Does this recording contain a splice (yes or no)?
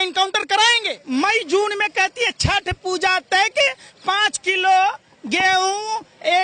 yes